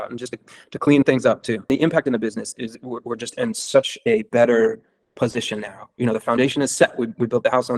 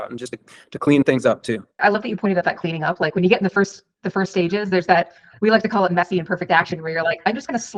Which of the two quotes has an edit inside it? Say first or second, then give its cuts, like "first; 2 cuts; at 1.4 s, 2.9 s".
first; 1 cut; at 1.7 s